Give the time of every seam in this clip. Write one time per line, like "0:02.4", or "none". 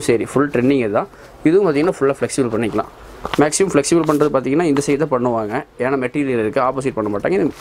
none

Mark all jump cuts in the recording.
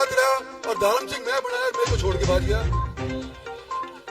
none

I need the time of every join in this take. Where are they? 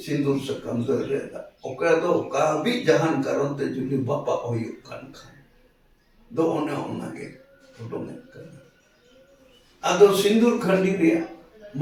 none

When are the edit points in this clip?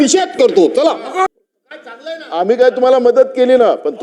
0:01.3

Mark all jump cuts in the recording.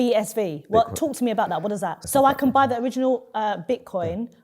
0:01.9

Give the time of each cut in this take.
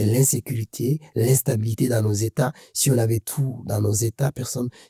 none

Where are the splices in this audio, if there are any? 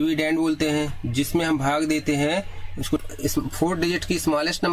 0:03.0

